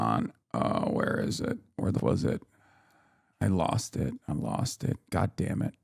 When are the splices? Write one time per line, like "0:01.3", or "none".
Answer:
0:02.0